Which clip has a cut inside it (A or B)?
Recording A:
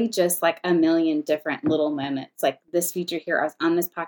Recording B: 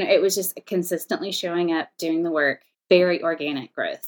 B